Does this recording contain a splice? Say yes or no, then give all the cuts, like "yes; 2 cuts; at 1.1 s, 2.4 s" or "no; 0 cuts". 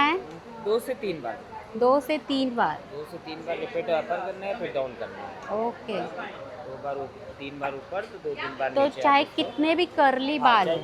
no; 0 cuts